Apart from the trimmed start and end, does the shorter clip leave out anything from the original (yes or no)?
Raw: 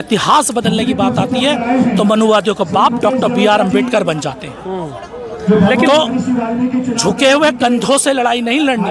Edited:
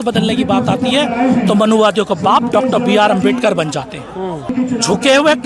yes